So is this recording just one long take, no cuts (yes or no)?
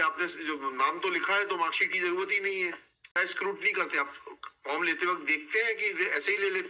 no